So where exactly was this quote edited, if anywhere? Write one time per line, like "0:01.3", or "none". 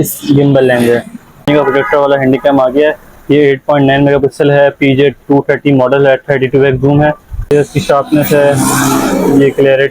0:01.5
0:07.5